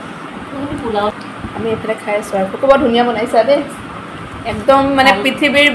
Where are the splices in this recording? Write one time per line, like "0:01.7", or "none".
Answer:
0:01.1

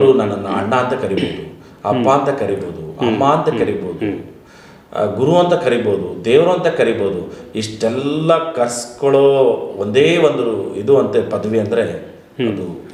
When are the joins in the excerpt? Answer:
none

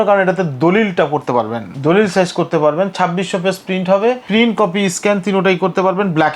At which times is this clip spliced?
0:01.6
0:04.2

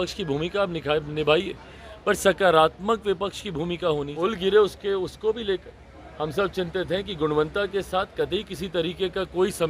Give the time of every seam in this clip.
0:04.1

